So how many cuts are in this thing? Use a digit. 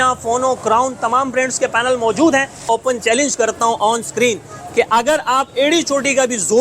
1